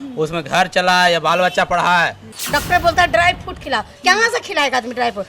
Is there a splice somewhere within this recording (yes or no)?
yes